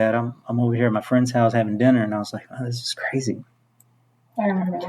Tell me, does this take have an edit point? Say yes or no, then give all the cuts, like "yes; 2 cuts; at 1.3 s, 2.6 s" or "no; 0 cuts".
no; 0 cuts